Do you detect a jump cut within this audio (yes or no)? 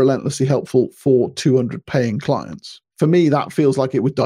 yes